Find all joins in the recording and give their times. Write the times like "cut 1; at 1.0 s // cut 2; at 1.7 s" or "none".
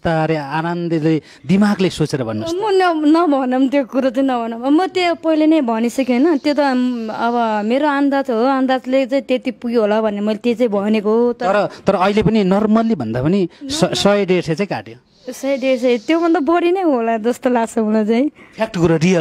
none